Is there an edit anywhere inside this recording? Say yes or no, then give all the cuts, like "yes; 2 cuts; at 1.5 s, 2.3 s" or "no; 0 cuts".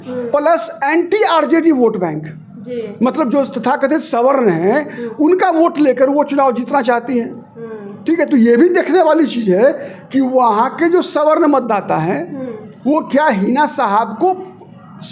no; 0 cuts